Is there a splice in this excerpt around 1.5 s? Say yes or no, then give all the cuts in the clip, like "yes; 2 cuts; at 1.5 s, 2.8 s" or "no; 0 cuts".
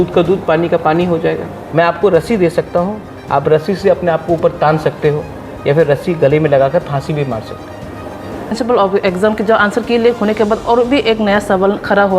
yes; 2 cuts; at 1.5 s, 8.5 s